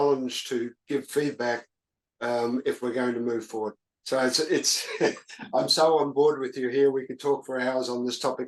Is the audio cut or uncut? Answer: uncut